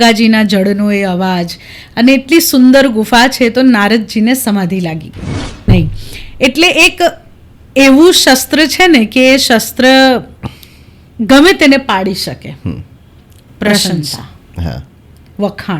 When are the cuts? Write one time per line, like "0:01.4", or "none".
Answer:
0:05.7